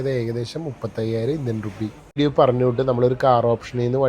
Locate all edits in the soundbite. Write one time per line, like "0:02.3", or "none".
0:02.2